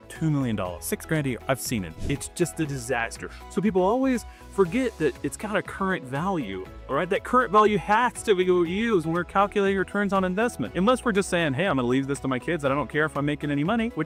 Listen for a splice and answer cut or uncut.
uncut